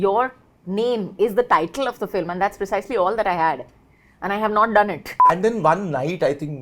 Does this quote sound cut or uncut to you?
cut